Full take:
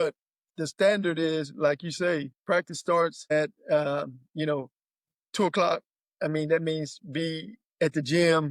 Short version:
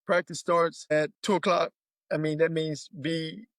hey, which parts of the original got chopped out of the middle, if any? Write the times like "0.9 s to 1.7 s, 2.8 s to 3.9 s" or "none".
3.6 s to 5.3 s